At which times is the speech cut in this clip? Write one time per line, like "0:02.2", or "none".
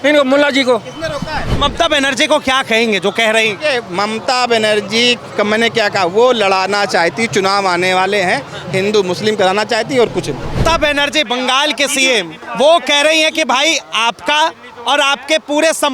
0:01.6
0:05.2
0:10.6
0:12.4